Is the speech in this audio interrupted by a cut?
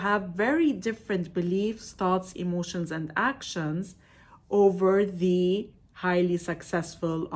no; 0 cuts

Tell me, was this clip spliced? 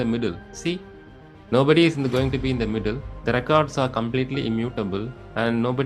no; 0 cuts

